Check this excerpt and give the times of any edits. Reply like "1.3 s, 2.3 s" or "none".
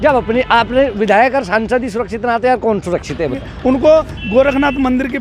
3.5 s